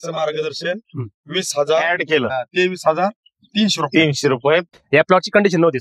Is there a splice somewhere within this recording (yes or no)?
yes